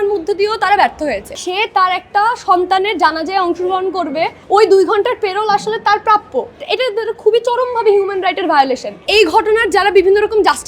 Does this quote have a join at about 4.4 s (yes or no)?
yes